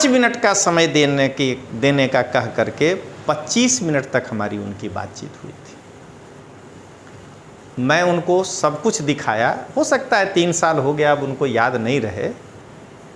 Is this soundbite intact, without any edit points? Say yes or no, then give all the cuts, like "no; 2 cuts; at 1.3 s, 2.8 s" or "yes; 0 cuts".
yes; 0 cuts